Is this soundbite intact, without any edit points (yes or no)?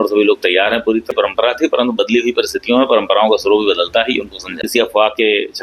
no